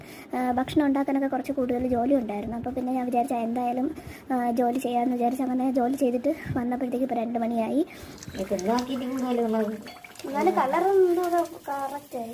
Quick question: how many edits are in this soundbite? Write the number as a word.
one